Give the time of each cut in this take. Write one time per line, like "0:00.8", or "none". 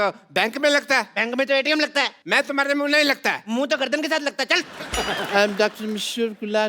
0:02.2
0:04.8